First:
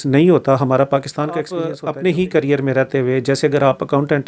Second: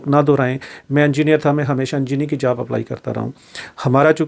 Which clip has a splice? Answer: first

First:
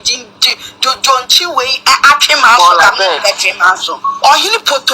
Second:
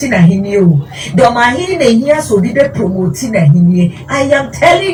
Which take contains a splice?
first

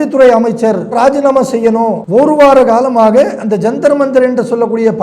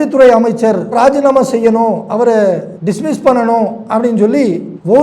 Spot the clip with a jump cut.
first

